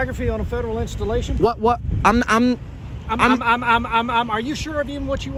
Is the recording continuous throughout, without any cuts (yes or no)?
yes